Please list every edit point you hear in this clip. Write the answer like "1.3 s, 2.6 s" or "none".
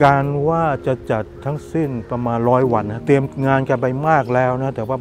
3.0 s